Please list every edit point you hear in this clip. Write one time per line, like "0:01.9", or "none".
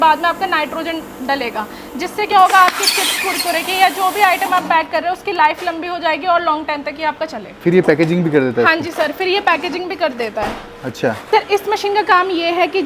0:07.6
0:11.2